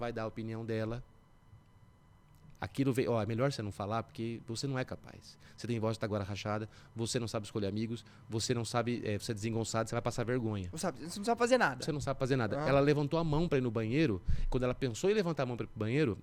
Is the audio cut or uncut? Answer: uncut